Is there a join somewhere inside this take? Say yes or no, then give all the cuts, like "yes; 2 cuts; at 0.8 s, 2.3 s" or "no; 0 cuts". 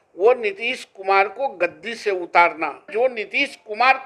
yes; 1 cut; at 2.9 s